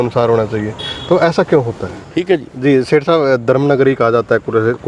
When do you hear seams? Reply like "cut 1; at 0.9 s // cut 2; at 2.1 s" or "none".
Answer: cut 1; at 2.0 s